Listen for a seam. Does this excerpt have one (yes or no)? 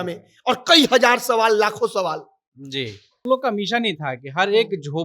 yes